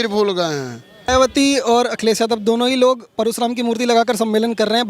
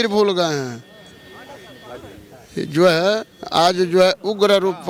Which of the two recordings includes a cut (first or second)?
first